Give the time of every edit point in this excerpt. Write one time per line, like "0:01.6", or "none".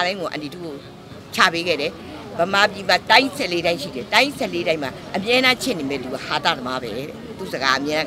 none